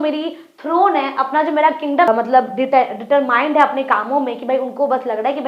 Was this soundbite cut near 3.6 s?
no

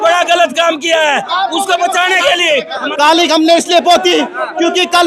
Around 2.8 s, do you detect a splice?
yes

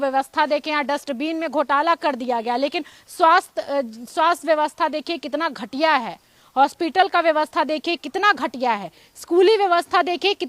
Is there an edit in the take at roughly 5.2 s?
yes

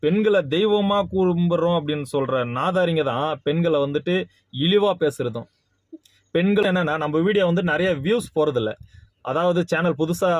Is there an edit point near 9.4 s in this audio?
no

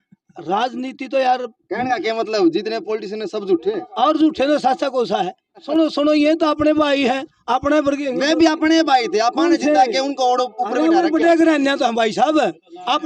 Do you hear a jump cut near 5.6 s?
yes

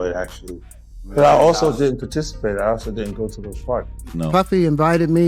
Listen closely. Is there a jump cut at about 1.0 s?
yes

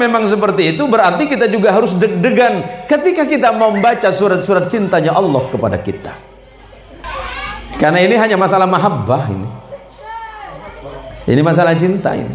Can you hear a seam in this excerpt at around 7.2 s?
yes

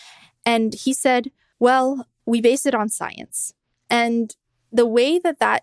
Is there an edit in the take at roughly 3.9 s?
no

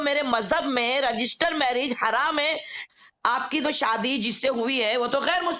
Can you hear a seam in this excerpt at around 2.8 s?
yes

